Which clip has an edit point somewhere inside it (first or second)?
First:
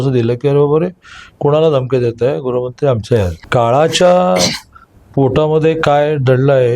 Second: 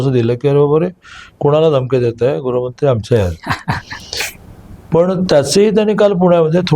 first